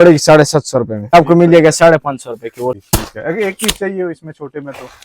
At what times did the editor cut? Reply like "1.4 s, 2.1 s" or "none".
1.1 s, 2.8 s